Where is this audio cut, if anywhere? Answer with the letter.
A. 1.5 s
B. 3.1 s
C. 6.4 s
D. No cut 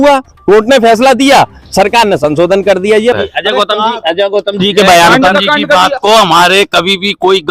B